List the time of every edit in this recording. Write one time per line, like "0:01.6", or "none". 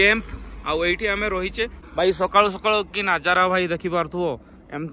0:01.8